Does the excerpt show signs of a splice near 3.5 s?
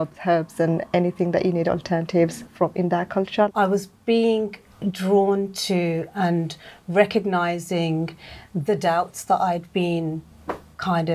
yes; 2 cuts; at 2.4 s, 3.5 s

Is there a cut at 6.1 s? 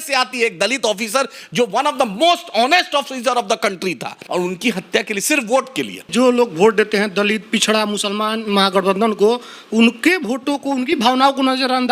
yes; 2 cuts; at 4.2 s, 6.1 s

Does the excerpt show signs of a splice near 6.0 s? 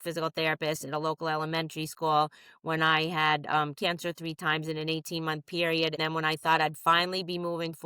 yes; 1 cut; at 6.0 s

